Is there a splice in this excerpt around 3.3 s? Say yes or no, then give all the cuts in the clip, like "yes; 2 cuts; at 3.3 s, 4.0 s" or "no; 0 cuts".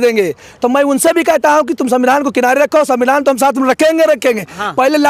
no; 0 cuts